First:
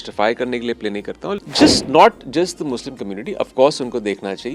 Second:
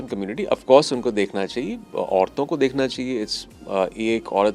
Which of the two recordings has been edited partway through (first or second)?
first